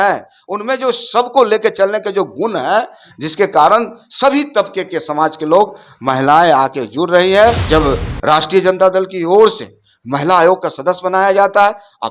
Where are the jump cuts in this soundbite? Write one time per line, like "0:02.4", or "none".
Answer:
0:07.6

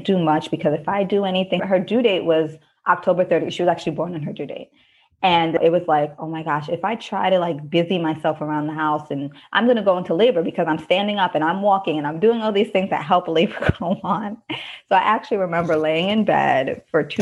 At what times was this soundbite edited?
0:01.6
0:05.6

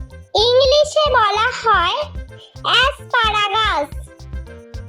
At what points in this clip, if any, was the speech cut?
0:03.9

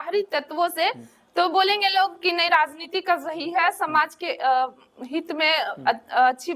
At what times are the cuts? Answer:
none

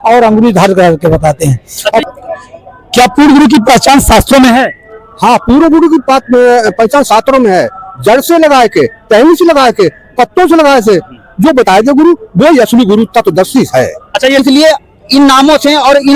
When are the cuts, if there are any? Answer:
0:02.0
0:13.9

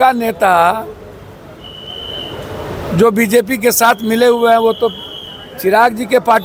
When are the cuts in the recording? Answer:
none

